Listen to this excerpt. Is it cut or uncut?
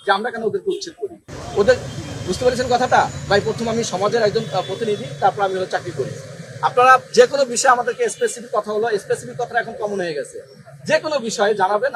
uncut